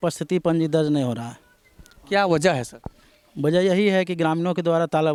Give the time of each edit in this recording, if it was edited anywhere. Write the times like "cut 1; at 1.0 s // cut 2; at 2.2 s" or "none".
none

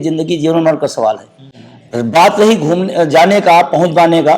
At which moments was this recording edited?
none

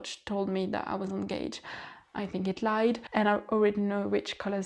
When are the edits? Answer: cut 1; at 3.0 s

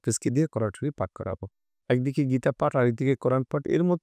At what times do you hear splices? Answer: none

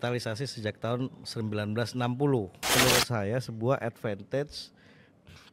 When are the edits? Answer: cut 1; at 2.6 s

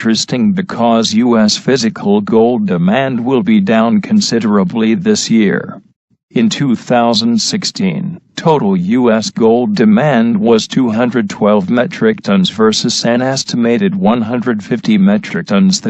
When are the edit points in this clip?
cut 1; at 1.1 s

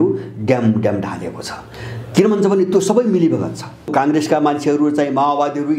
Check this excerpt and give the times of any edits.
cut 1; at 3.9 s

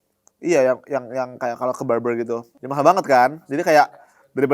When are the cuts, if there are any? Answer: cut 1; at 2.5 s

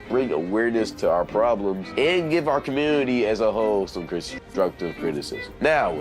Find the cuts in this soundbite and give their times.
none

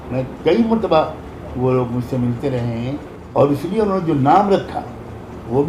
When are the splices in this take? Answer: cut 1; at 3.1 s

